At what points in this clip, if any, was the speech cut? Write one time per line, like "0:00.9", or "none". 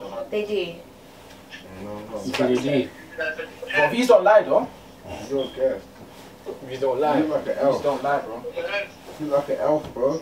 none

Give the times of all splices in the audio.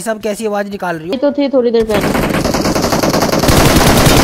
0:01.1

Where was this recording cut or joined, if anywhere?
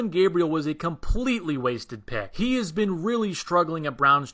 none

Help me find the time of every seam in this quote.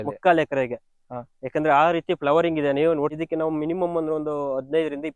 0:03.1

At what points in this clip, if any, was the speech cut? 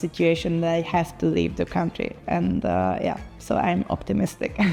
none

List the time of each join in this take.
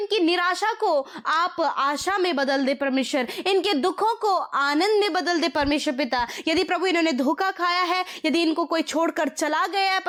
none

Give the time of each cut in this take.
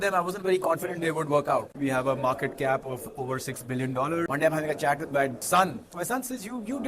0:01.7
0:04.3

